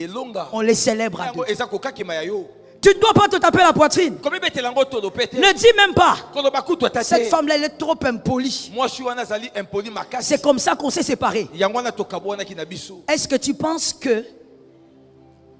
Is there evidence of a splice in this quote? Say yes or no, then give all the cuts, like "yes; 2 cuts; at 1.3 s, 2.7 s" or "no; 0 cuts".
yes; 1 cut; at 1.3 s